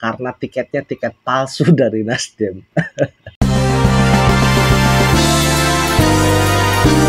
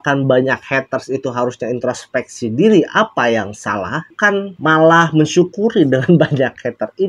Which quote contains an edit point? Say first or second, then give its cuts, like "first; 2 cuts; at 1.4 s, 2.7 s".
first; 1 cut; at 3.2 s